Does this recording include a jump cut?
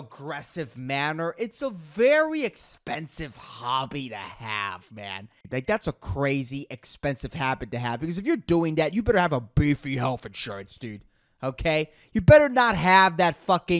yes; 1 cut; at 5.4 s

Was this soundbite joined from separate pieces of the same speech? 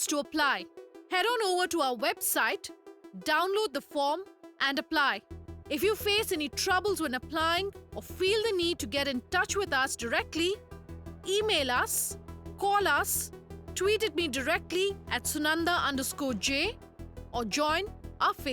no; 0 cuts

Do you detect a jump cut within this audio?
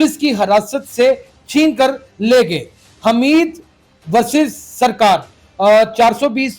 no; 0 cuts

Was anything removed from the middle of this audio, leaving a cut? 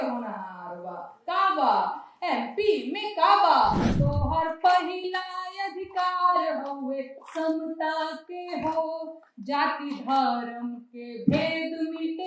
yes; 1 cut; at 3.9 s

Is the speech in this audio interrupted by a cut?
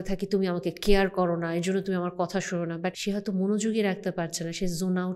yes; 1 cut; at 3.0 s

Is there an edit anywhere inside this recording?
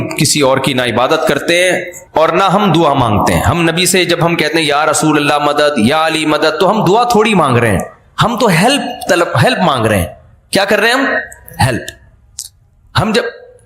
yes; 1 cut; at 1.9 s

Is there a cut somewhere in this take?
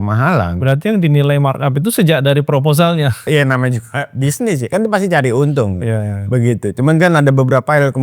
yes; 1 cut; at 3.3 s

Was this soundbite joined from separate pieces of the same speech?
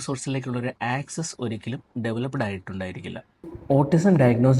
yes; 1 cut; at 3.5 s

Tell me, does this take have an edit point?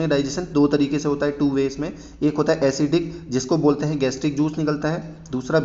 no; 0 cuts

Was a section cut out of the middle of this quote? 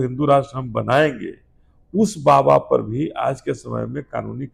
no; 0 cuts

